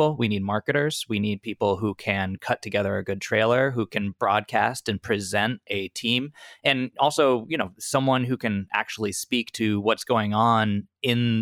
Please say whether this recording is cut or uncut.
cut